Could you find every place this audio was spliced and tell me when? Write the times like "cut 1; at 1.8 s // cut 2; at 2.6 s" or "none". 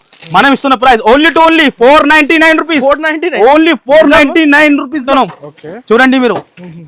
cut 1; at 5.1 s